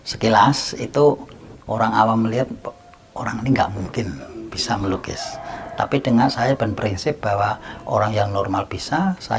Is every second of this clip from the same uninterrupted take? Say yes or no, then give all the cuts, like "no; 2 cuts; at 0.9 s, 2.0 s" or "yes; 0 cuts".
yes; 0 cuts